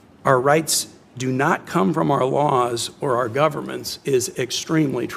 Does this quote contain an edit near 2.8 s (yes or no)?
no